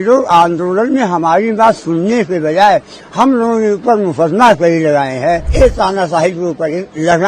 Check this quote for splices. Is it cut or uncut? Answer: cut